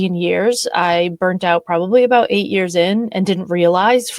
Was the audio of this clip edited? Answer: no; 0 cuts

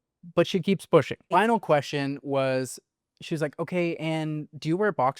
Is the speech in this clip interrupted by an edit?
yes; 1 cut; at 1.3 s

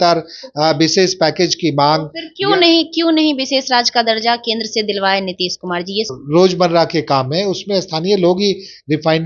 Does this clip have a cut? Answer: yes; 1 cut; at 6.1 s

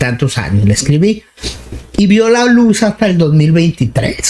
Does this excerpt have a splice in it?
no; 0 cuts

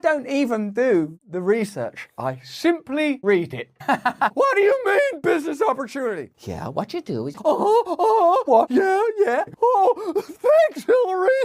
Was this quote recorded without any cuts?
no; 3 cuts; at 7.4 s, 8.5 s, 9.5 s

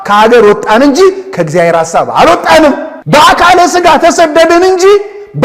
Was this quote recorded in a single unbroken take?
no; 1 cut; at 2.9 s

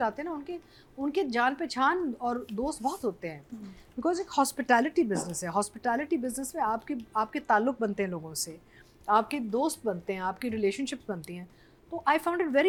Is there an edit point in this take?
no; 0 cuts

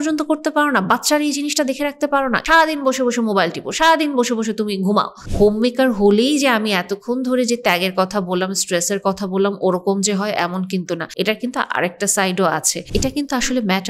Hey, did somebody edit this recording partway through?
yes; 4 cuts; at 2.4 s, 5.2 s, 11.1 s, 12.8 s

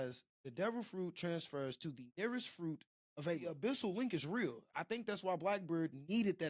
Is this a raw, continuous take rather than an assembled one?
no; 1 cut; at 3.5 s

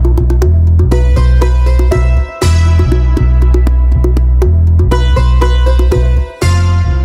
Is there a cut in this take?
no; 0 cuts

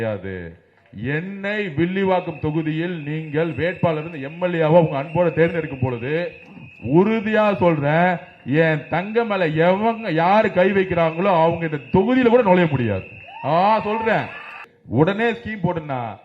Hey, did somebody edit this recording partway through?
yes; 1 cut; at 14.7 s

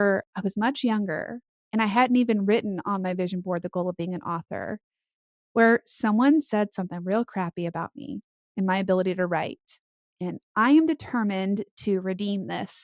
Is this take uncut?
yes; 0 cuts

